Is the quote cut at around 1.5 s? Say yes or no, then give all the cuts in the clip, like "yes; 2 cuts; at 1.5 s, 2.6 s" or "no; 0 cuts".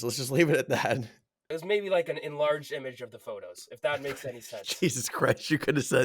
yes; 1 cut; at 1.5 s